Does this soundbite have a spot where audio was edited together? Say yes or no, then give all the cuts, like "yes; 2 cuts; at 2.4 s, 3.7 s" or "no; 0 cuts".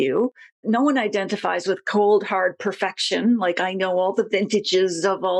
no; 0 cuts